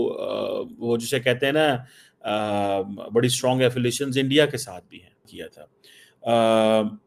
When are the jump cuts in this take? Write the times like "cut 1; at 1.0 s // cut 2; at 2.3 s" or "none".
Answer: cut 1; at 5.3 s